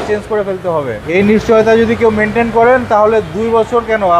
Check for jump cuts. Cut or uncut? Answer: cut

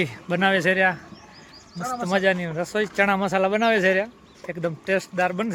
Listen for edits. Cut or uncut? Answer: uncut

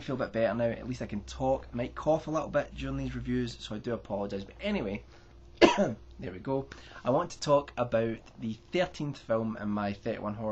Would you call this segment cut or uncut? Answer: uncut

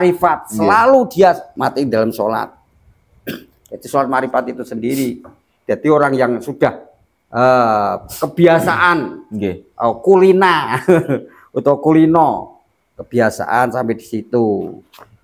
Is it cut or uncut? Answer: cut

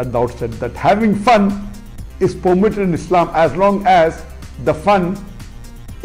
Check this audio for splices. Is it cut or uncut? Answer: uncut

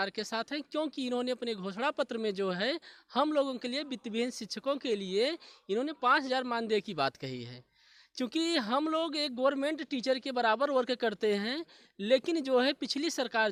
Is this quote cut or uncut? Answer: uncut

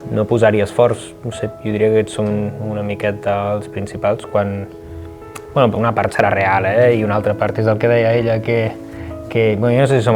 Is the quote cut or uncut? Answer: uncut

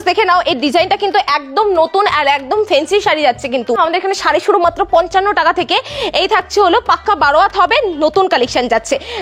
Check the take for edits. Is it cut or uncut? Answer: cut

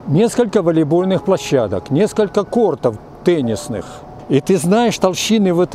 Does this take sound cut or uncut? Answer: cut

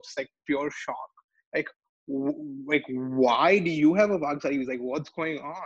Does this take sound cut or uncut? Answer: uncut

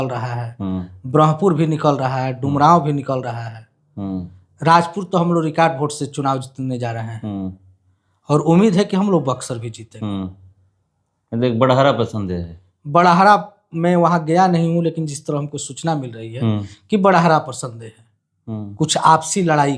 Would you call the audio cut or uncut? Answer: uncut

